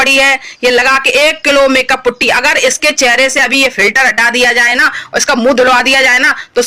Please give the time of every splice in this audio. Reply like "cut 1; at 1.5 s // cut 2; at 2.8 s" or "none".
none